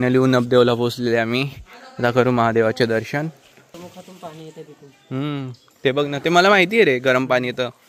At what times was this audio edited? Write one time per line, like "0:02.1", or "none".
none

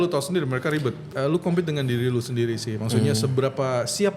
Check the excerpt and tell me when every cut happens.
0:01.1

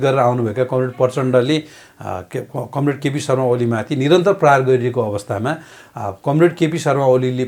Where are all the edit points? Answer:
none

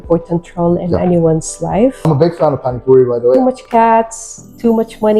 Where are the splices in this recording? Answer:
0:02.1
0:03.4

